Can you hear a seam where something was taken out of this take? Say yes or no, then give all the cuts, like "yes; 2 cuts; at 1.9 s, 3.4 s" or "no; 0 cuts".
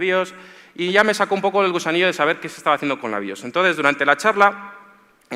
no; 0 cuts